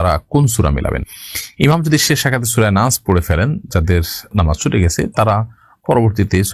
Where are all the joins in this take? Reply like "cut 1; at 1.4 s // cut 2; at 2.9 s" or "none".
none